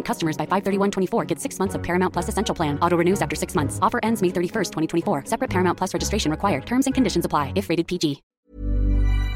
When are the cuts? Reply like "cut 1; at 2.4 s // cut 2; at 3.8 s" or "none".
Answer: cut 1; at 8.3 s